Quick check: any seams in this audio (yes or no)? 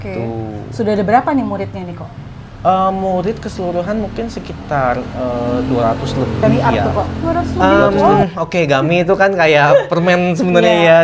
yes